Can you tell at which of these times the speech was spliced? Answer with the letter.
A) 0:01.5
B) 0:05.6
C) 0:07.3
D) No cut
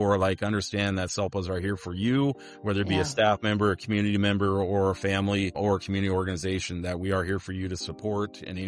B